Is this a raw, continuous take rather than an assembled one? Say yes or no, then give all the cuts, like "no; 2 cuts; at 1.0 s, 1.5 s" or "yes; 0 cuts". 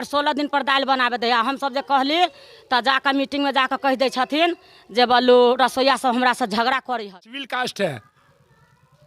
no; 1 cut; at 7.1 s